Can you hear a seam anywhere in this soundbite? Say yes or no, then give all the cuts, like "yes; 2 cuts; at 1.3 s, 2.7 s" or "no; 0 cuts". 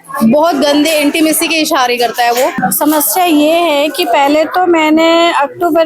yes; 1 cut; at 2.6 s